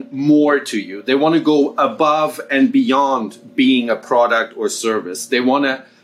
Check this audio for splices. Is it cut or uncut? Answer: uncut